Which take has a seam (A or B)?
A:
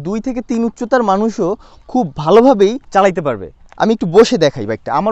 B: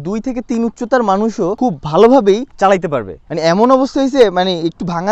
B